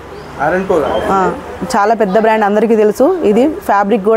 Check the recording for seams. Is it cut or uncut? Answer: uncut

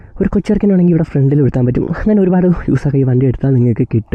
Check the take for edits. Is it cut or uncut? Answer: uncut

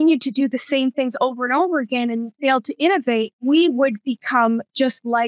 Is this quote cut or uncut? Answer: cut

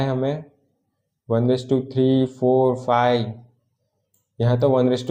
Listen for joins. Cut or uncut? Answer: uncut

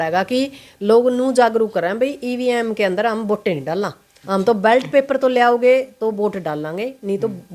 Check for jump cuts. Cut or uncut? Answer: uncut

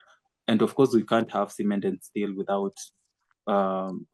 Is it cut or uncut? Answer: uncut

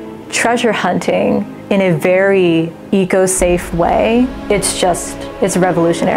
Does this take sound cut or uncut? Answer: cut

